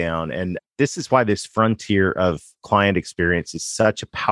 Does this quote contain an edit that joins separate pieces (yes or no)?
no